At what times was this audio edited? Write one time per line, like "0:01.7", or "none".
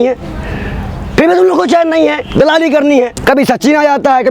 0:03.2